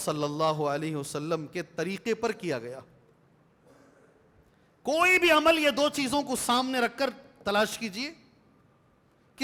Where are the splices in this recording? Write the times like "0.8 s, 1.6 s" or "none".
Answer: none